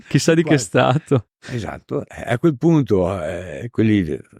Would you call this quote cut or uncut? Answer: uncut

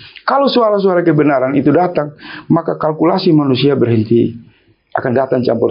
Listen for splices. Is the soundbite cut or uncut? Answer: uncut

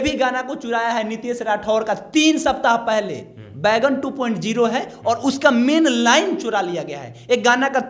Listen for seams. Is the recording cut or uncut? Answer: uncut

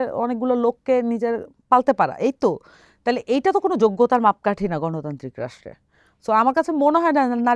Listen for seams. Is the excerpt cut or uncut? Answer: uncut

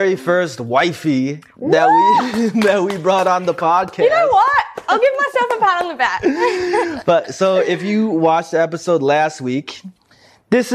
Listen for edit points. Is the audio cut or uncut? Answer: uncut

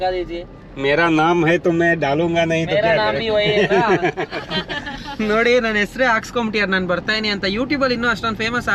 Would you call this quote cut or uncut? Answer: uncut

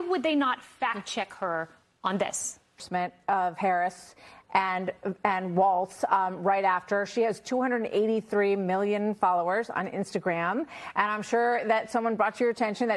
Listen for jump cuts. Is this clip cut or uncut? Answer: cut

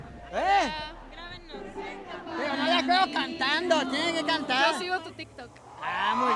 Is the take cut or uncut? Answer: uncut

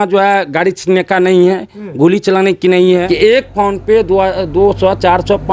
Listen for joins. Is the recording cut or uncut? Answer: cut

